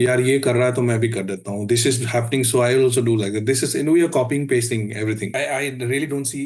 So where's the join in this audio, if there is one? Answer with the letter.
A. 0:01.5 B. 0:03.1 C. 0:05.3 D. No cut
C